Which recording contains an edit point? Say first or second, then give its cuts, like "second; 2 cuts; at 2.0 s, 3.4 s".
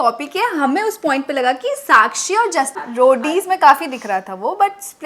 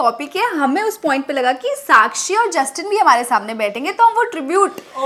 first; 1 cut; at 2.8 s